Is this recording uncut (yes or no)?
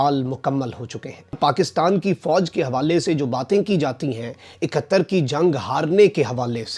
yes